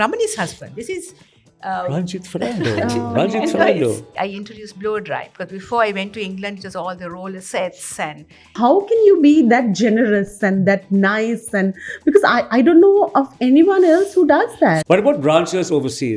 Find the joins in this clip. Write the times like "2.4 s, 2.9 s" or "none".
4.1 s, 8.5 s, 14.8 s